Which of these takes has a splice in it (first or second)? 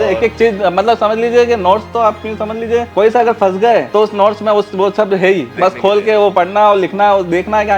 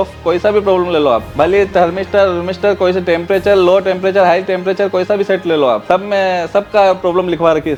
first